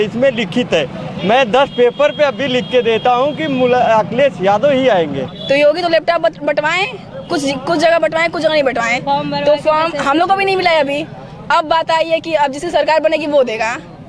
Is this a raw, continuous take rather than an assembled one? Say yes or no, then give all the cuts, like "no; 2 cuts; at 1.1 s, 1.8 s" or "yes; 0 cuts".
no; 1 cut; at 5.3 s